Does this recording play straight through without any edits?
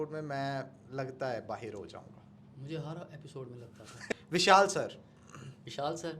no; 1 cut; at 4.2 s

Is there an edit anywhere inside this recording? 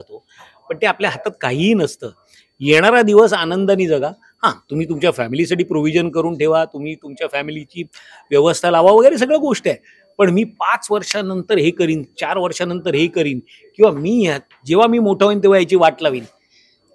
no; 0 cuts

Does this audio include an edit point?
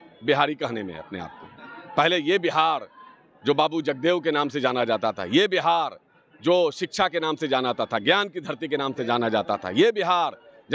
no; 0 cuts

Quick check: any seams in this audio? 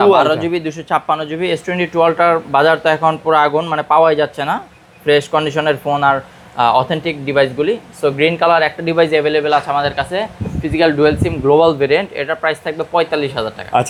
no; 0 cuts

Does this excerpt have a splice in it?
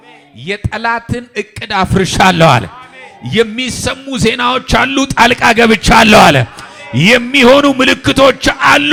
no; 0 cuts

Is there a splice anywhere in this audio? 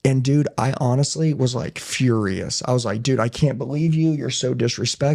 no; 0 cuts

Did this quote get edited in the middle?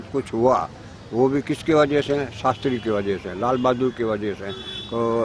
no; 0 cuts

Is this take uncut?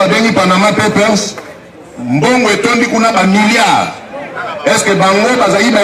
yes; 0 cuts

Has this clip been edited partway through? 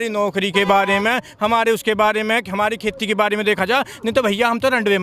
no; 0 cuts

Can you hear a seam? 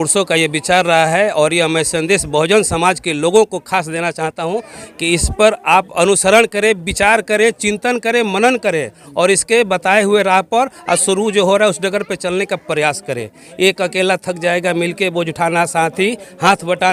no; 0 cuts

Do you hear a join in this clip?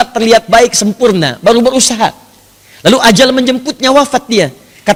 no; 0 cuts

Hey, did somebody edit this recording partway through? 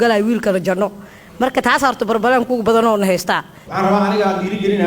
yes; 1 cut; at 3.6 s

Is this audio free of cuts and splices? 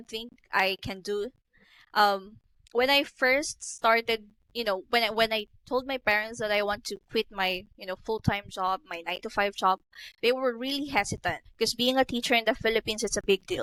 yes; 0 cuts

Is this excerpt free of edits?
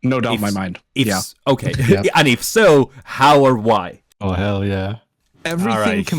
no; 1 cut; at 4.0 s

